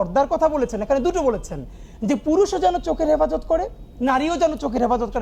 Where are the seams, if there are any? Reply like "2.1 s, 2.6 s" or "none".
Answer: none